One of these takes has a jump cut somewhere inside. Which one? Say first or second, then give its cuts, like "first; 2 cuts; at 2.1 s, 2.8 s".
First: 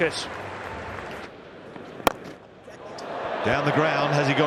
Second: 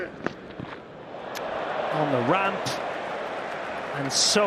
first; 1 cut; at 1.2 s